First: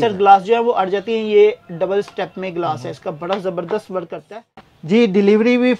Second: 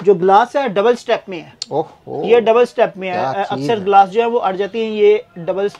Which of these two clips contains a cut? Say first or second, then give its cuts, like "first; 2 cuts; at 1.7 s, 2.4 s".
first; 1 cut; at 4.7 s